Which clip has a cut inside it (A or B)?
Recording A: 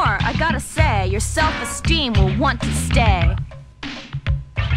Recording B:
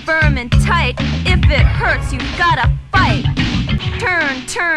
B